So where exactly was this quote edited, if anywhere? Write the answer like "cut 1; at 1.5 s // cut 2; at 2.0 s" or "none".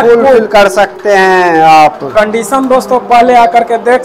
none